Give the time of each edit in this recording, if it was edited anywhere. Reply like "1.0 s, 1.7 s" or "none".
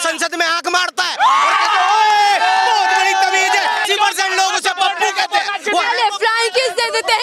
3.8 s